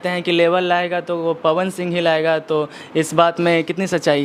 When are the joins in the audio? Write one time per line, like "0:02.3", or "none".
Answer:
none